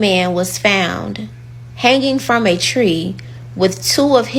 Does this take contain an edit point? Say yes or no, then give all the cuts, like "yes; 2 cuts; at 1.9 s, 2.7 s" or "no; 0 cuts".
no; 0 cuts